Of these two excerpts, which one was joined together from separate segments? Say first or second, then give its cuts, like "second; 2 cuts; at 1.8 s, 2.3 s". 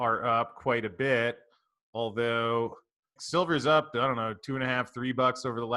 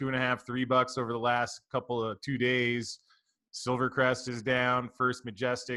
first; 1 cut; at 3.2 s